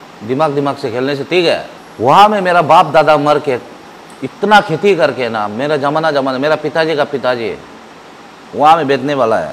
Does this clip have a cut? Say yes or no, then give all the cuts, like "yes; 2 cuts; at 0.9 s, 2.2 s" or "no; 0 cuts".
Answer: no; 0 cuts